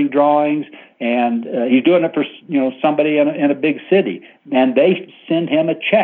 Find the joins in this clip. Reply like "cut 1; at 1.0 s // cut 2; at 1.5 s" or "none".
cut 1; at 5.1 s